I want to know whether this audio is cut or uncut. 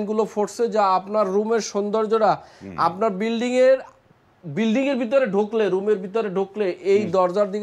uncut